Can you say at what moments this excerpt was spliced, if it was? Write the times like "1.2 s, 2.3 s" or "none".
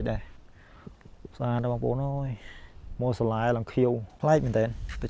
4.1 s